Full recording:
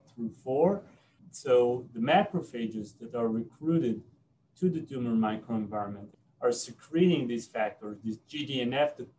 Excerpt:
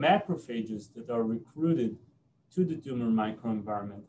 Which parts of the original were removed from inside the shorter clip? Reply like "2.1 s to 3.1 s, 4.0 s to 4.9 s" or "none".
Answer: none